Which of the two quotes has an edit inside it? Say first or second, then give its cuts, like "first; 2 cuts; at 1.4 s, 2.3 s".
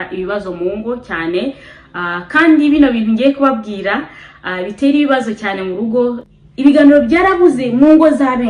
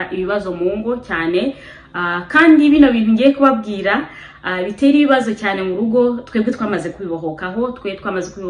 first; 1 cut; at 6.2 s